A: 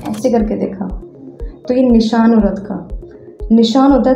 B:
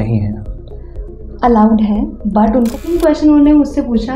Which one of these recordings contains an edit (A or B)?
B